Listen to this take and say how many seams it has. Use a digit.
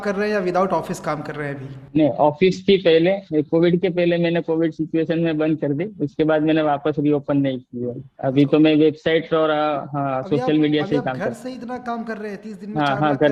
0